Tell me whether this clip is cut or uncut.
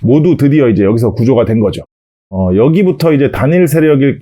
cut